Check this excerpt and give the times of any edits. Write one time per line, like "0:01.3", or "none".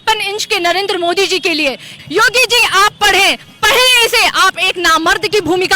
0:02.0